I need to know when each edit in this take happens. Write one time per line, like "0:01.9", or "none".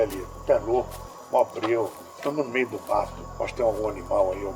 none